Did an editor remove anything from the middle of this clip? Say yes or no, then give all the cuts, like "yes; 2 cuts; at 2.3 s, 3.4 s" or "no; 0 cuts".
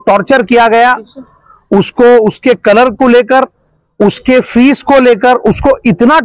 no; 0 cuts